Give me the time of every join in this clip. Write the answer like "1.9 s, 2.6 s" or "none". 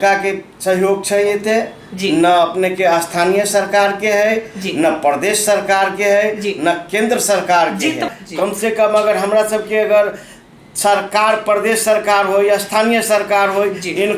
8.1 s